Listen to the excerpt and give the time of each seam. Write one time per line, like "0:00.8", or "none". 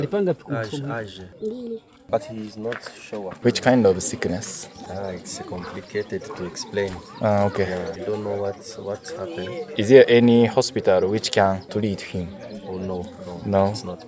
0:01.2
0:03.4
0:04.9
0:08.0
0:09.7